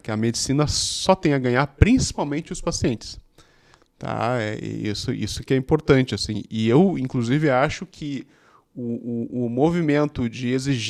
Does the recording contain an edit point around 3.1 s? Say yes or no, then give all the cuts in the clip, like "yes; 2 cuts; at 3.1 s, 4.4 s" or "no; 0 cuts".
no; 0 cuts